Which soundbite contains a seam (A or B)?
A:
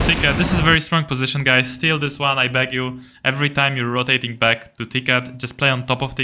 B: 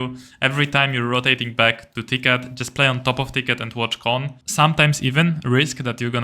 B